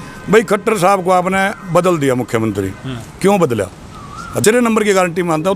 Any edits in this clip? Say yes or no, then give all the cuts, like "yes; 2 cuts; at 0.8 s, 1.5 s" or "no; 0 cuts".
yes; 1 cut; at 4.4 s